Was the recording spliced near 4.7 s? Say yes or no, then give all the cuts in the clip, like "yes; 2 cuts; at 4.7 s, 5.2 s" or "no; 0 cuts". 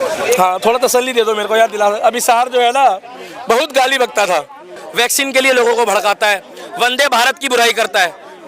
yes; 1 cut; at 4.7 s